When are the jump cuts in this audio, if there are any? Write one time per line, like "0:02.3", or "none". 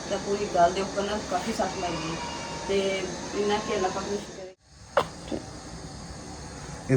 0:04.3